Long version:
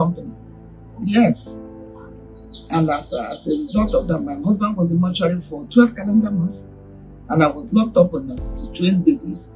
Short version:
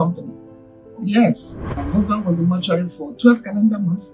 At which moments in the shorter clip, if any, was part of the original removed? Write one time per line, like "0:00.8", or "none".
0:01.8